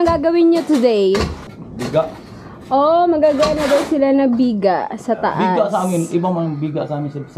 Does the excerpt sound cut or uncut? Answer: cut